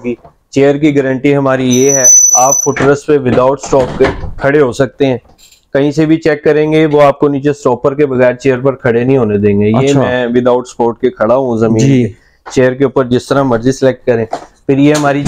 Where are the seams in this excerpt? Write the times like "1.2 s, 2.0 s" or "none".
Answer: none

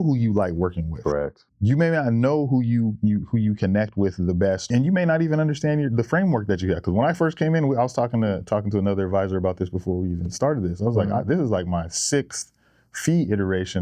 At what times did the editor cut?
1.4 s, 4.7 s

